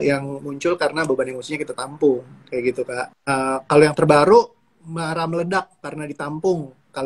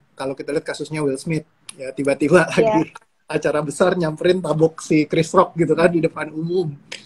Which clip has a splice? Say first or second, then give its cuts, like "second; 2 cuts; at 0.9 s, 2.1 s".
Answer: first; 1 cut; at 3.1 s